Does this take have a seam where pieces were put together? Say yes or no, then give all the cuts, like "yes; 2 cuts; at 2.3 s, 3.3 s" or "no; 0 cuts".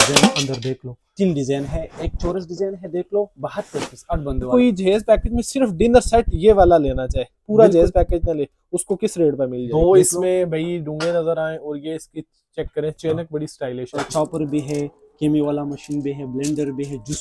yes; 4 cuts; at 1.1 s, 4.5 s, 9.6 s, 14.0 s